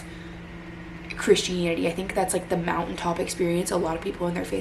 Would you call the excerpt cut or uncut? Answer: uncut